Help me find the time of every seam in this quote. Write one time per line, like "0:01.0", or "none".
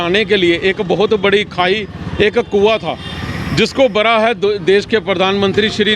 none